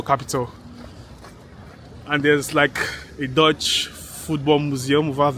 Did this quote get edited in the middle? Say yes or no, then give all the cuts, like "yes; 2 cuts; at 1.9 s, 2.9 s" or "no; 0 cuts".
no; 0 cuts